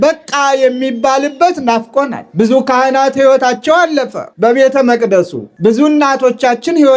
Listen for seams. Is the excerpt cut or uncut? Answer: cut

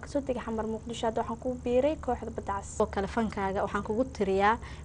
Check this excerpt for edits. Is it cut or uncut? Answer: cut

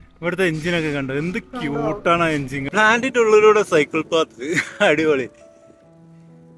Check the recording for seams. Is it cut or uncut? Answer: cut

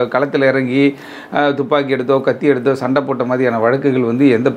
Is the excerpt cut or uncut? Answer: uncut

